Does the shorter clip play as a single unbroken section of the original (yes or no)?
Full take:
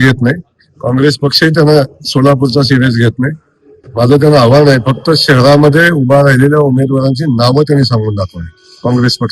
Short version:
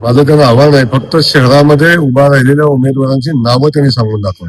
yes